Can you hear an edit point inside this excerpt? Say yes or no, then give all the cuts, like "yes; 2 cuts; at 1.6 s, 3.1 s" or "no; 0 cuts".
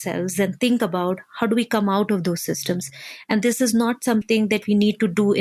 no; 0 cuts